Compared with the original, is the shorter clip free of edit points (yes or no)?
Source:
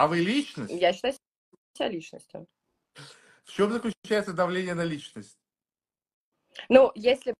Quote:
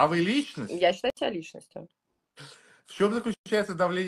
no